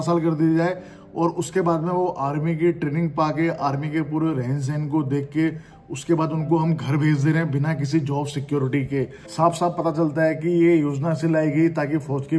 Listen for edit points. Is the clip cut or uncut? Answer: cut